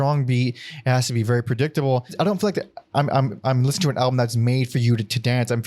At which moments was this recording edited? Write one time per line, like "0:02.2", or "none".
0:02.1